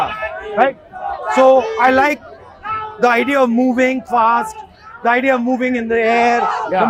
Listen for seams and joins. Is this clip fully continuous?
yes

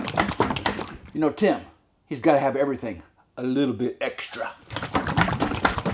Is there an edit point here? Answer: no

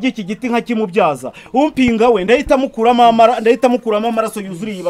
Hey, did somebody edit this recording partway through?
no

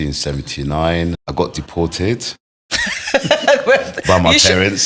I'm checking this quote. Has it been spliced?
yes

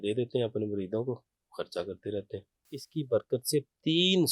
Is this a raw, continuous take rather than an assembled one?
no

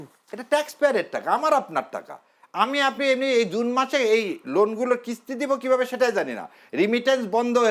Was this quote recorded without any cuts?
yes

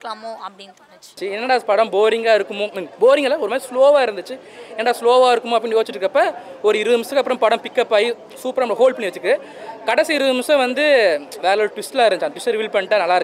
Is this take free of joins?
no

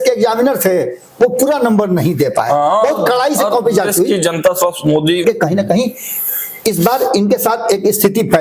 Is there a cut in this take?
yes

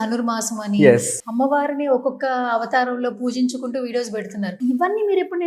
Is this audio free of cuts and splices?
no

